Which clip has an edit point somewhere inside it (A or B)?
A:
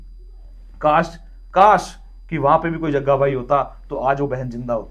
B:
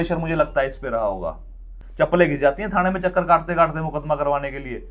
B